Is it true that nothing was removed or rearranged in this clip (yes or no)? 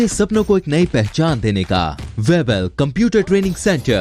no